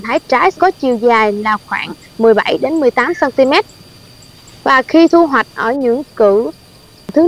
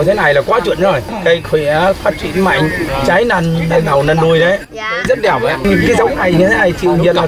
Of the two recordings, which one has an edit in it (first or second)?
second